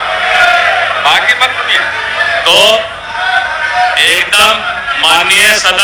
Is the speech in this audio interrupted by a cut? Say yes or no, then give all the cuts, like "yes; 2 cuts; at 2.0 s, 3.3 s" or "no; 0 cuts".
no; 0 cuts